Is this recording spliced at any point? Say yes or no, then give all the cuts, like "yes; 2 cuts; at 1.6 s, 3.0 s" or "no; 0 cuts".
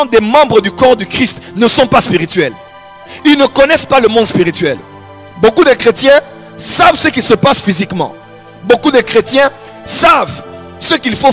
no; 0 cuts